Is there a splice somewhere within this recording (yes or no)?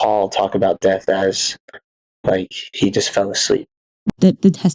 yes